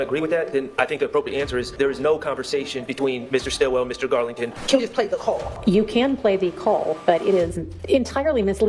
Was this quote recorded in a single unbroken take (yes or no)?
no